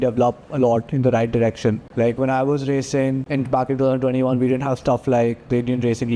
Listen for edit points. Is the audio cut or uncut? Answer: cut